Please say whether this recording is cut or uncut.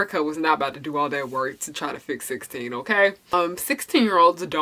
cut